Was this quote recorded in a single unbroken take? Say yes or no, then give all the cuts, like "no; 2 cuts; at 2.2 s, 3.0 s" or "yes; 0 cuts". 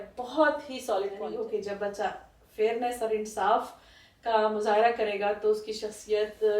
no; 1 cut; at 1.3 s